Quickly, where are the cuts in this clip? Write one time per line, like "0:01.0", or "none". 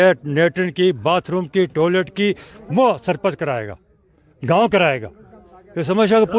none